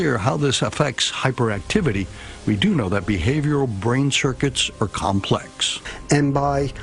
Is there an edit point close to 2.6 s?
yes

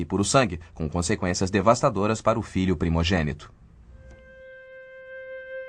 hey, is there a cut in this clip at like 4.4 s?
yes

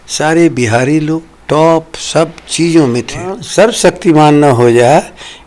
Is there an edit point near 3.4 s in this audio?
yes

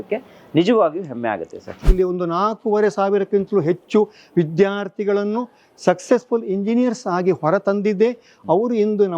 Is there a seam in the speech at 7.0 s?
no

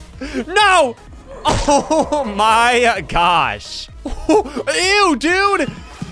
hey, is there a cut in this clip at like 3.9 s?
yes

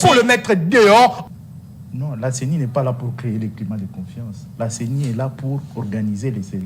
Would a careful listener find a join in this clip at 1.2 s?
yes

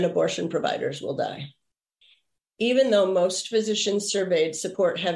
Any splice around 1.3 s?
no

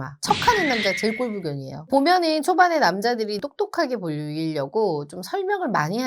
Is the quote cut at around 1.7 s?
yes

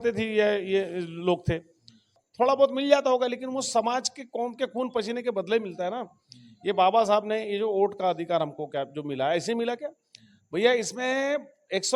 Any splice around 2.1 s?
yes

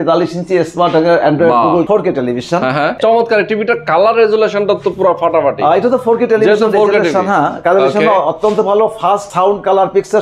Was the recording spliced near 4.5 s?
no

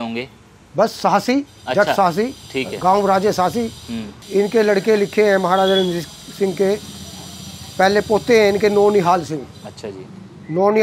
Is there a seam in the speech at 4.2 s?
yes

